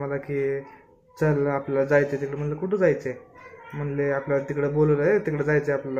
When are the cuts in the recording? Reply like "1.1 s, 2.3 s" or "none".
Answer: none